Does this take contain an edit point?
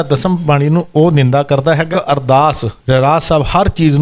yes; 1 cut; at 1.9 s

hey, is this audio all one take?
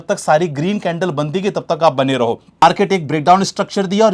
no; 1 cut; at 2.6 s

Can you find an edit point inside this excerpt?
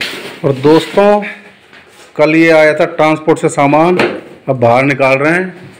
no; 0 cuts

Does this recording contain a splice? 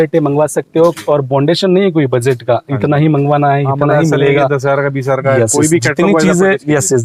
no; 0 cuts

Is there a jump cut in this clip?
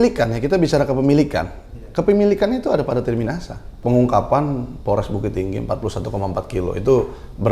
yes; 1 cut; at 3.7 s

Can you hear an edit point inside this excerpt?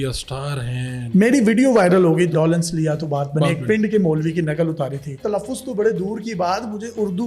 yes; 3 cuts; at 1.0 s, 2.3 s, 5.2 s

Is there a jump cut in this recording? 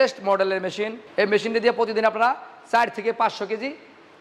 yes; 1 cut; at 1.0 s

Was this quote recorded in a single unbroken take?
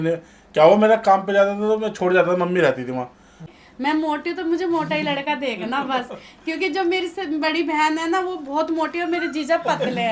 no; 1 cut; at 3.5 s

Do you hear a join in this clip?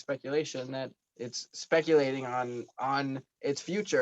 yes; 1 cut; at 1.0 s

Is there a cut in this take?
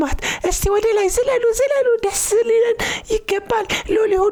no; 0 cuts

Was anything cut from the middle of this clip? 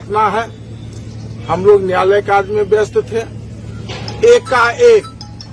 no; 0 cuts

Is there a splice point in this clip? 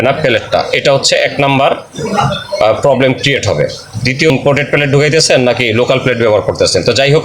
yes; 1 cut; at 4.3 s

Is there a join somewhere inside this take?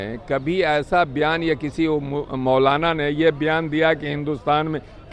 no; 0 cuts

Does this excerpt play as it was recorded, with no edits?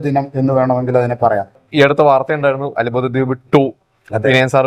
no; 1 cut; at 1.6 s

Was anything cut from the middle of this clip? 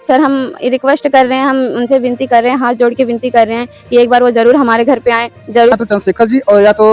yes; 1 cut; at 5.7 s

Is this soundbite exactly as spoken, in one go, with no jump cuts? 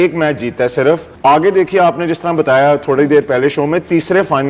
no; 1 cut; at 1.1 s

